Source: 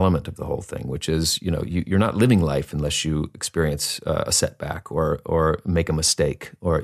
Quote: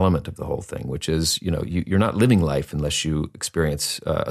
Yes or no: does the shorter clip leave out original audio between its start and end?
no